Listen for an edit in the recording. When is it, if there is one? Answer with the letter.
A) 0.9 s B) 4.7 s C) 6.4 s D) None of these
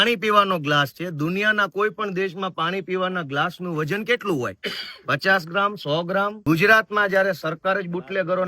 C